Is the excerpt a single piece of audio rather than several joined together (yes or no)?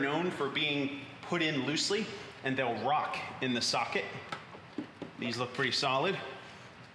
yes